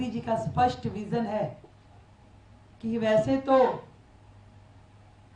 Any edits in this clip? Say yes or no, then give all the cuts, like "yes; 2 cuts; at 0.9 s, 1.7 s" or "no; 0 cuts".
no; 0 cuts